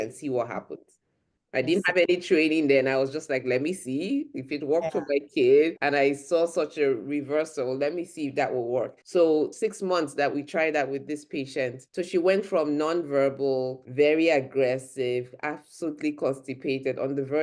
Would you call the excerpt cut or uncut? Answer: cut